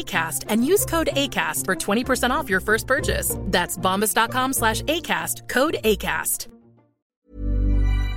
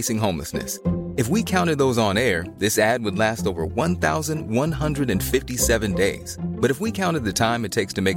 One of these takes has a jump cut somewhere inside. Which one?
first; 1 cut; at 7.1 s

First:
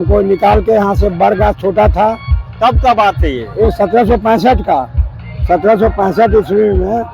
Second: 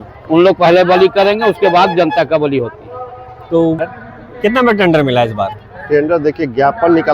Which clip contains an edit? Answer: second; 1 cut; at 3.8 s

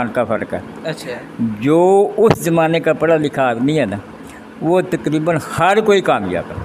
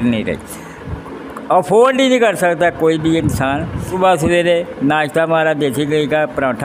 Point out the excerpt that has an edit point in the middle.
second; 1 cut; at 3.9 s

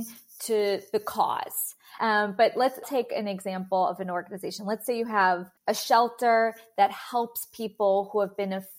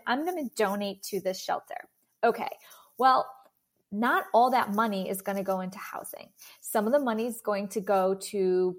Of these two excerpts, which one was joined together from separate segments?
first; 3 cuts; at 1.9 s, 2.8 s, 5.5 s

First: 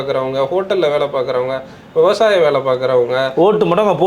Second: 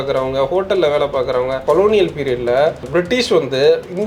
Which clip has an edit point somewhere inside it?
second; 1 cut; at 1.6 s

